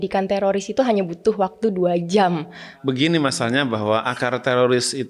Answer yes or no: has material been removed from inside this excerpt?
yes